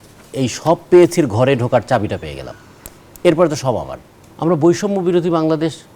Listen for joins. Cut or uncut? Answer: cut